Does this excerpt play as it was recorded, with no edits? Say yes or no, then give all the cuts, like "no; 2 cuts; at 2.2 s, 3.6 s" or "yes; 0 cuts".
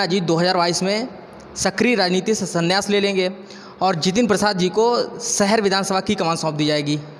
yes; 0 cuts